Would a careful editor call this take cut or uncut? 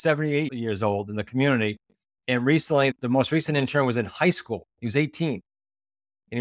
uncut